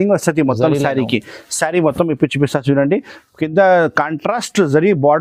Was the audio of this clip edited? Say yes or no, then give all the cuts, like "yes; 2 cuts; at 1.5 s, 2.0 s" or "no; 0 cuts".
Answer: no; 0 cuts